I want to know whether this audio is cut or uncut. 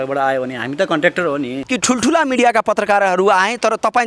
cut